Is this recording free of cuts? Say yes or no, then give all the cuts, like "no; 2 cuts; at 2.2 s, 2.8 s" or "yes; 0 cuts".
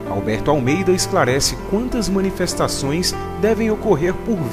yes; 0 cuts